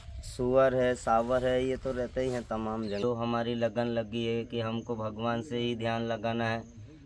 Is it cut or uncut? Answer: cut